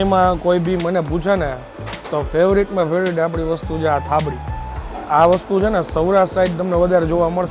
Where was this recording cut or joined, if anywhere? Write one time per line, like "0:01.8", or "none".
none